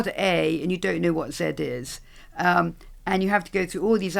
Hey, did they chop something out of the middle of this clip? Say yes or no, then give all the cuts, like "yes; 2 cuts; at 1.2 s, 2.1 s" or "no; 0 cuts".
no; 0 cuts